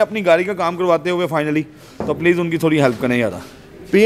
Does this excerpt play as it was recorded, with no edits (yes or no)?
yes